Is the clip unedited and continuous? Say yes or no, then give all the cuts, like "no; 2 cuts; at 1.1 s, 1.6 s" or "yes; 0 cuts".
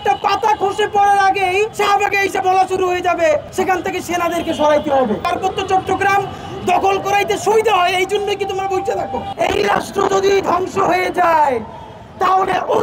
no; 4 cuts; at 1.7 s, 3.5 s, 5.2 s, 9.3 s